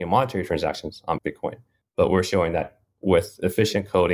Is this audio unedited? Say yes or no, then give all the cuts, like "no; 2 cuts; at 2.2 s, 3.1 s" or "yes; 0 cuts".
no; 1 cut; at 1.2 s